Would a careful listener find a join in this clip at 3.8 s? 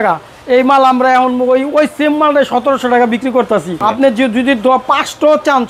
yes; 1 cut; at 3.8 s

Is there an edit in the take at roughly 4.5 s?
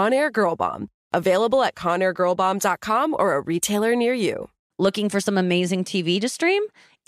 yes; 1 cut; at 4.5 s

